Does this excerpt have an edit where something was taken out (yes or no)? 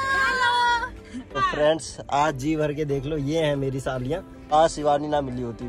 yes